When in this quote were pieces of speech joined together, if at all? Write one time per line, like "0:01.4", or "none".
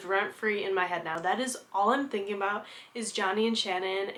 none